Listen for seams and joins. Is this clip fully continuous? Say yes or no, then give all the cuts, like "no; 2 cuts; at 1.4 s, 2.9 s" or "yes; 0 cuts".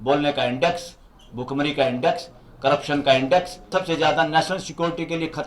no; 1 cut; at 3.7 s